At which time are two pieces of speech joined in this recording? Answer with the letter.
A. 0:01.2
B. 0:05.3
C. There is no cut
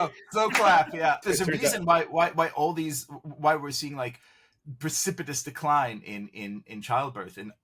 A